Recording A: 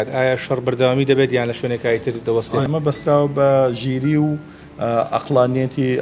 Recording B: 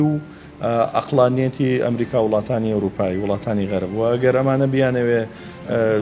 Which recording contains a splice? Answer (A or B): A